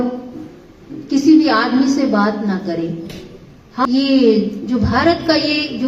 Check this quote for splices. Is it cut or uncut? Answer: cut